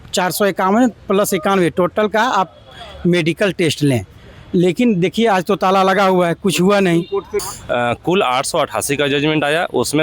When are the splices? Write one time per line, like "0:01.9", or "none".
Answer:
0:07.4